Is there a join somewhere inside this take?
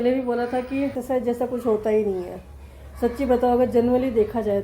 yes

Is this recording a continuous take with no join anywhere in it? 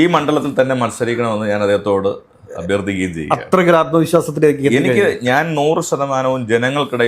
yes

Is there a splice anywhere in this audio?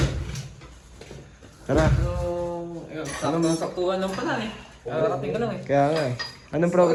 no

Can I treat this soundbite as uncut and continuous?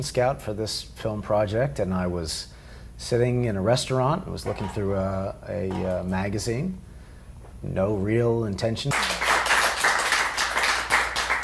yes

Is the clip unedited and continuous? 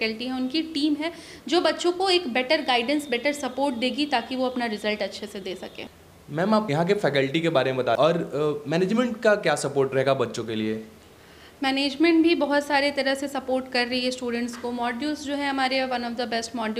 yes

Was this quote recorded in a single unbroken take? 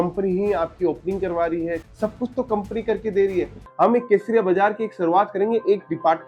no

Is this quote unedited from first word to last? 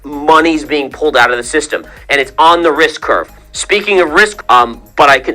no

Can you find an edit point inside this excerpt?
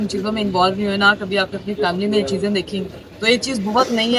no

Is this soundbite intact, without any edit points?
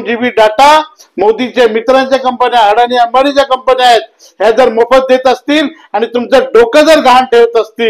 no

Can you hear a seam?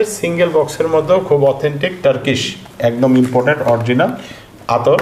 no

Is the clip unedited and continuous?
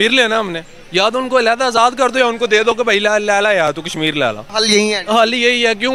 yes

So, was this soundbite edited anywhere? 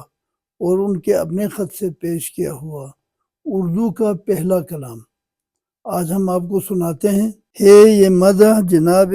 yes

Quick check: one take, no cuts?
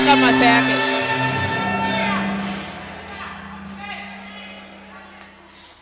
yes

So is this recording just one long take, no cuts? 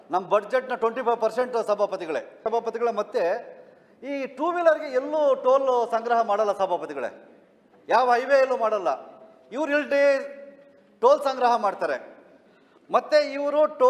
no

